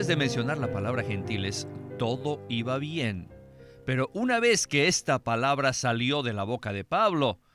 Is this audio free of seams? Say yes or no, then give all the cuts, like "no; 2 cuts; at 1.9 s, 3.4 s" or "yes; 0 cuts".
yes; 0 cuts